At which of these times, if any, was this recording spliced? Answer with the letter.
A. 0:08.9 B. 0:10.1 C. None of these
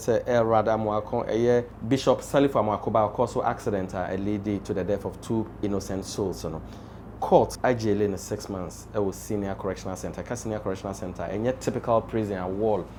C